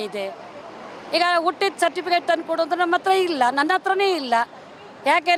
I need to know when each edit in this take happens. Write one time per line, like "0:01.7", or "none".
none